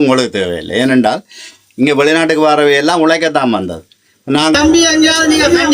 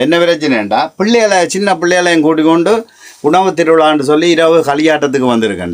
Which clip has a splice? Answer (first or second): first